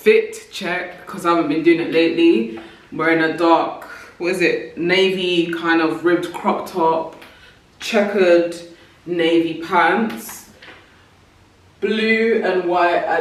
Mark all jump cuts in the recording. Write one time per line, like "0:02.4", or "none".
none